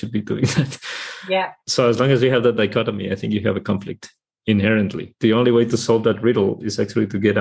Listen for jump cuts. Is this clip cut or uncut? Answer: cut